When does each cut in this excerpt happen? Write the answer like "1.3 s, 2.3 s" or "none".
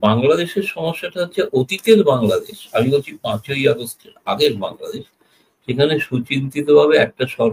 none